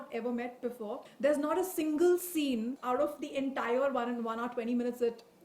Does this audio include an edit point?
yes; 2 cuts; at 1.1 s, 2.8 s

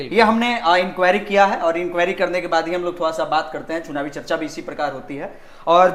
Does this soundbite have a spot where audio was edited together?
no; 0 cuts

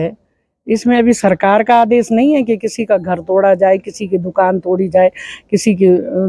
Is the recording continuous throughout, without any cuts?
yes; 0 cuts

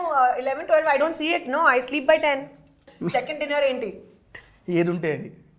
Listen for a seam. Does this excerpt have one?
yes; 1 cut; at 2.9 s

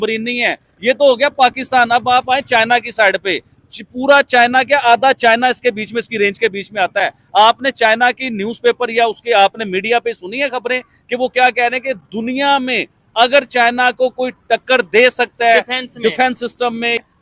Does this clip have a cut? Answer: no; 0 cuts

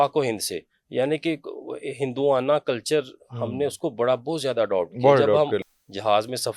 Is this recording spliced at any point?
yes; 1 cut; at 5.6 s

